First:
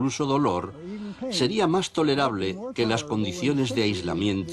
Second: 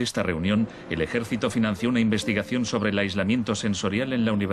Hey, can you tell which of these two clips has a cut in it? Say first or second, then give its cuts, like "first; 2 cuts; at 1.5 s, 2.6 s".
first; 1 cut; at 1.6 s